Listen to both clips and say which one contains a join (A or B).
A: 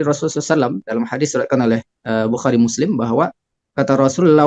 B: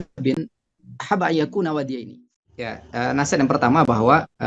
B